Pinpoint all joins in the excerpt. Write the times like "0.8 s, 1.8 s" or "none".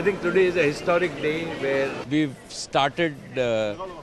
2.0 s